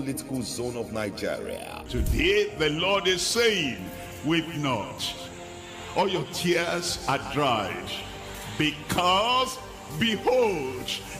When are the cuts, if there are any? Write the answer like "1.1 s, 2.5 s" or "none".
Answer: 1.6 s